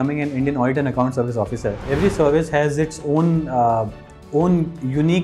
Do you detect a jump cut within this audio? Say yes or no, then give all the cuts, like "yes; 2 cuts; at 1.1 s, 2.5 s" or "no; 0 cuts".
yes; 1 cut; at 1.9 s